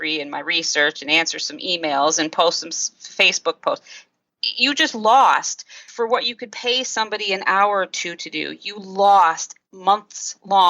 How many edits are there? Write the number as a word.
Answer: two